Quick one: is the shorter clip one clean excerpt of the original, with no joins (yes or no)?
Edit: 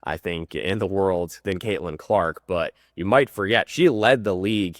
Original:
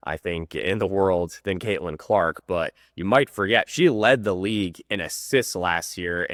yes